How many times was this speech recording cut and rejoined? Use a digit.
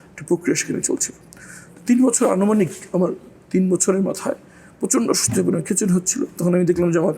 0